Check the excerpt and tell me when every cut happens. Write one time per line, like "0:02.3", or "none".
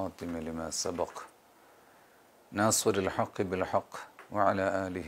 none

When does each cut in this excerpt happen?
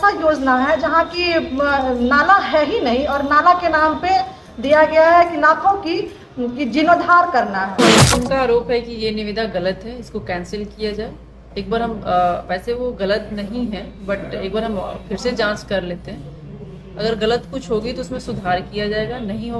0:07.9

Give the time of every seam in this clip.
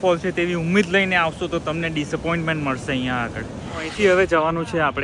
0:03.8

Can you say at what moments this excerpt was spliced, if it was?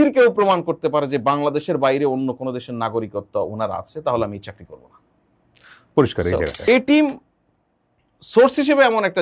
0:06.5

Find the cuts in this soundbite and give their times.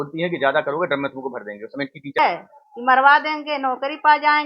0:02.2

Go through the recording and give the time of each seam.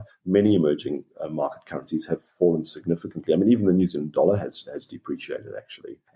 none

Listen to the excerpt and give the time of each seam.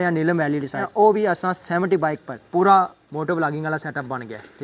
0:00.8
0:02.3

